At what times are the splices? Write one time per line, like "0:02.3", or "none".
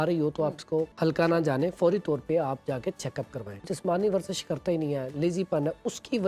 0:00.9
0:03.6